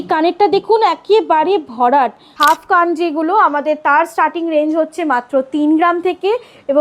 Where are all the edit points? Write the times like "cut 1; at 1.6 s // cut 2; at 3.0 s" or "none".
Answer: cut 1; at 2.2 s

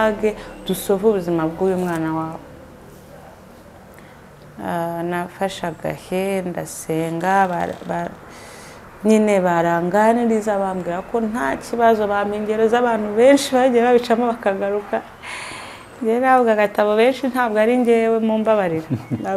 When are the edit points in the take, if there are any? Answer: none

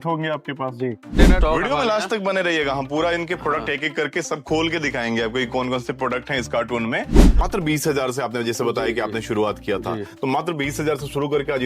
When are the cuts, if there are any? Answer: cut 1; at 1.4 s // cut 2; at 7.3 s

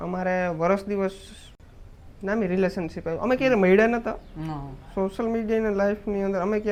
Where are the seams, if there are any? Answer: none

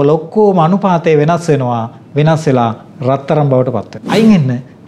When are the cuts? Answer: cut 1; at 4.0 s

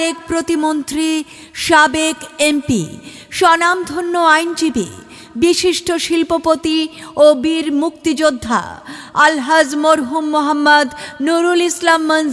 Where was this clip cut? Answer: none

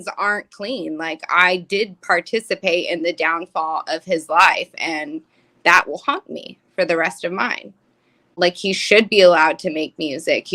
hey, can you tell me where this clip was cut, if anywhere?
cut 1; at 8.4 s

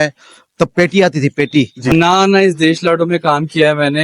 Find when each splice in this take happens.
cut 1; at 1.9 s

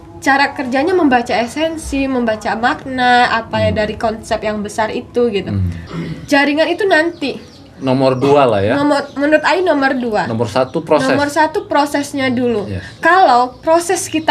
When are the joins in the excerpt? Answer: cut 1; at 5.9 s

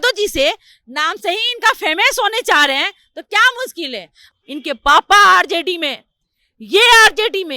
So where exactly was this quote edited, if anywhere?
cut 1; at 4.2 s

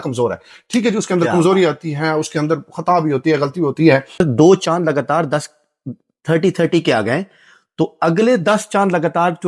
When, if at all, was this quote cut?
cut 1; at 4.2 s

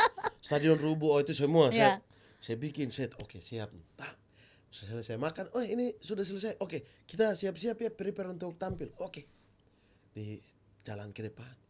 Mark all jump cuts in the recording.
none

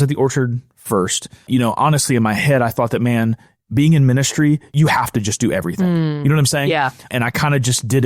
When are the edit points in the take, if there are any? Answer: cut 1; at 1.5 s // cut 2; at 4.7 s // cut 3; at 7.1 s

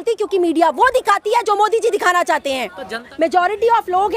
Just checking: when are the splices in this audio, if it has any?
cut 1; at 3.1 s

